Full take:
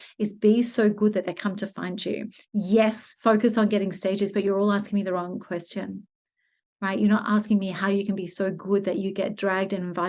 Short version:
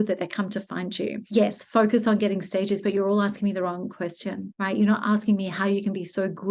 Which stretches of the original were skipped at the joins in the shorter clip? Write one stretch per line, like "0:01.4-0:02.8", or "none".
0:02.5-0:02.9
0:06.0-0:06.7